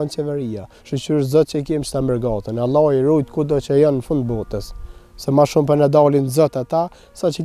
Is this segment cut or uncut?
uncut